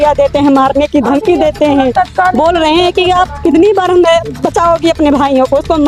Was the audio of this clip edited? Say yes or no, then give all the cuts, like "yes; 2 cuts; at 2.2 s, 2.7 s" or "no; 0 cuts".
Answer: no; 0 cuts